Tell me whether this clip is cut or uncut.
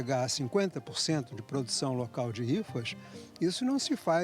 uncut